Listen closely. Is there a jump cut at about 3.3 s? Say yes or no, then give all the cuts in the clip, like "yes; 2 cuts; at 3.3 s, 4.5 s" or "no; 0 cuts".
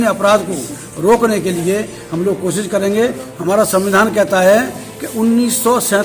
yes; 1 cut; at 3.3 s